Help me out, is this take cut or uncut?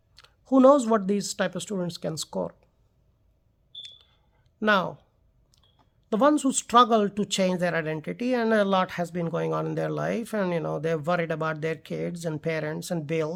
uncut